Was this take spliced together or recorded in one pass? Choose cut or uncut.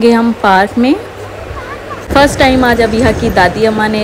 cut